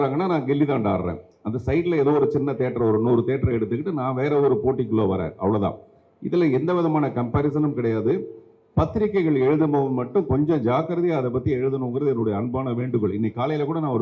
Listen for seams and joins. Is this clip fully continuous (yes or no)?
yes